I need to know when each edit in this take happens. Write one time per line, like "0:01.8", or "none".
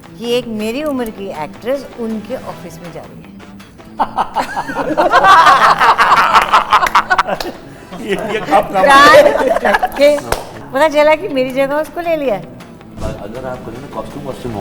0:10.6
0:12.9